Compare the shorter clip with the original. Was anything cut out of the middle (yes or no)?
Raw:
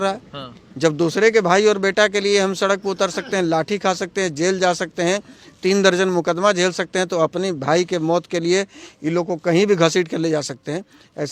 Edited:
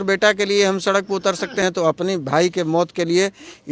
yes